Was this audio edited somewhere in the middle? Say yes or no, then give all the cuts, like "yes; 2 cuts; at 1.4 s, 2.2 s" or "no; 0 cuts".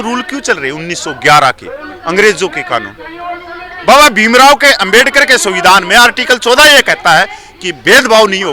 no; 0 cuts